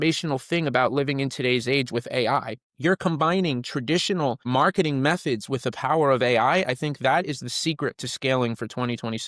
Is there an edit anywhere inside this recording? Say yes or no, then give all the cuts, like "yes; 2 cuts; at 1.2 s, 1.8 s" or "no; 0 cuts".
no; 0 cuts